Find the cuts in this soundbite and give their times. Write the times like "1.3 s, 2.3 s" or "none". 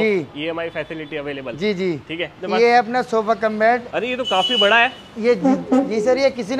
2.4 s